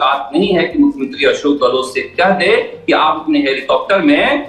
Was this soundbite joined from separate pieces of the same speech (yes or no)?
no